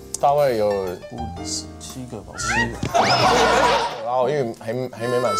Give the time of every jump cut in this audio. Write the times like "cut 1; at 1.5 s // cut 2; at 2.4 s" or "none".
cut 1; at 3.9 s